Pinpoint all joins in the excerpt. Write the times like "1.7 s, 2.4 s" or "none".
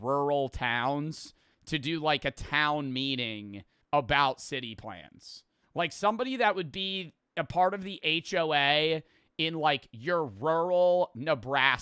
10.8 s